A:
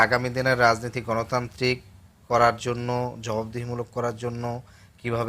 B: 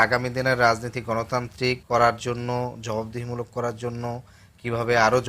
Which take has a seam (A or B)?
B